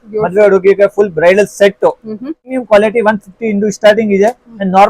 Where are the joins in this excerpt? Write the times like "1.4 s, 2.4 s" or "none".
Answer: 2.5 s